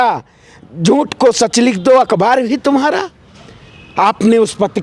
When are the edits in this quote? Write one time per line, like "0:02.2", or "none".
none